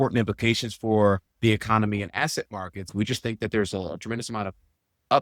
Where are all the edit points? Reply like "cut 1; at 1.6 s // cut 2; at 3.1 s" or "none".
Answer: cut 1; at 2.9 s